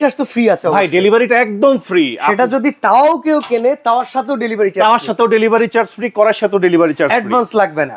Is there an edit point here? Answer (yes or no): no